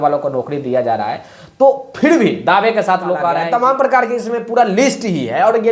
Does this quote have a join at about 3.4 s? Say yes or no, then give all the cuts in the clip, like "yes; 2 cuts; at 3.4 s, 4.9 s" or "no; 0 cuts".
yes; 1 cut; at 3.4 s